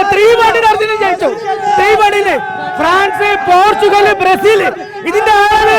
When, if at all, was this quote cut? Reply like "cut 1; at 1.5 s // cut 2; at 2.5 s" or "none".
none